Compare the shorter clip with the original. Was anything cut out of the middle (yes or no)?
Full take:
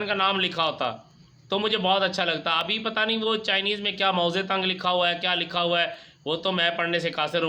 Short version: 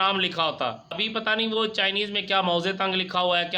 yes